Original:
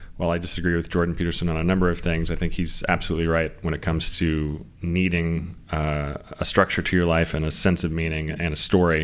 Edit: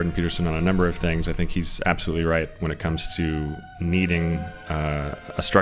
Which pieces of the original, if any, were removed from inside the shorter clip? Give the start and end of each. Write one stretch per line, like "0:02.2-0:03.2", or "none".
none